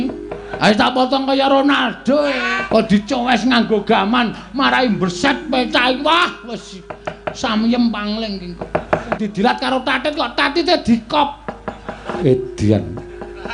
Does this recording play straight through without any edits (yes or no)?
no